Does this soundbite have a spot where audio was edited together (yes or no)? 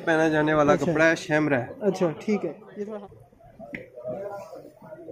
yes